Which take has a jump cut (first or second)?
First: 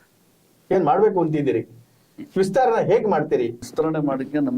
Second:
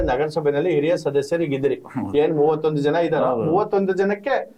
first